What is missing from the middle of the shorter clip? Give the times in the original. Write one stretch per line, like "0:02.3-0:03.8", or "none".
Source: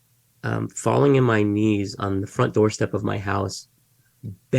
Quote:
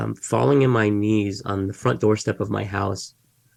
none